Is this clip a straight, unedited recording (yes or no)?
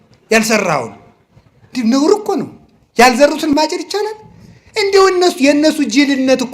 no